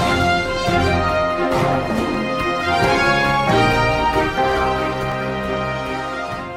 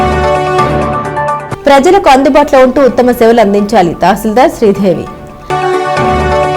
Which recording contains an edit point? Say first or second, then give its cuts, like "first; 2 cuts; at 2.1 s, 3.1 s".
second; 1 cut; at 1.0 s